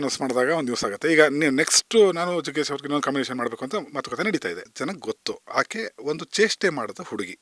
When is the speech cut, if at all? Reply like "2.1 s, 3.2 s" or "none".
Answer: 4.6 s